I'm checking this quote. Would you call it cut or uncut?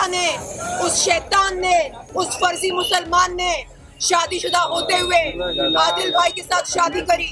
uncut